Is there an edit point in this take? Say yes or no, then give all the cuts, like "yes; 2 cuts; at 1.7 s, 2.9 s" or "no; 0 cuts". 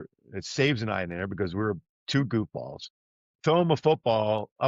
no; 0 cuts